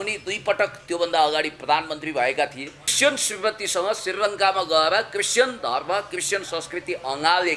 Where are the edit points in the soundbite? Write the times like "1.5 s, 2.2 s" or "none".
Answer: 2.9 s